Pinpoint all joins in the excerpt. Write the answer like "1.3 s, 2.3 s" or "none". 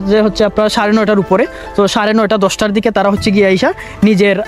none